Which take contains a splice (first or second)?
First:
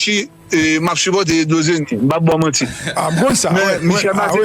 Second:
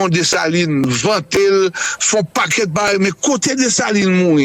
first